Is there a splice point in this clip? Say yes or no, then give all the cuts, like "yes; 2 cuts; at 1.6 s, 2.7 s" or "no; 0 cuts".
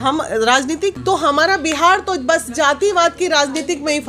yes; 1 cut; at 1.0 s